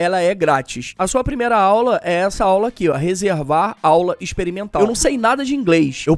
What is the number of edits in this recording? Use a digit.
1